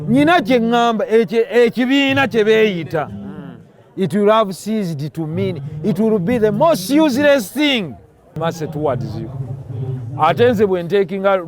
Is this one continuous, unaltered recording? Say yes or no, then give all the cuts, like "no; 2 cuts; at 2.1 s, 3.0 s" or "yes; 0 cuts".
no; 1 cut; at 8.3 s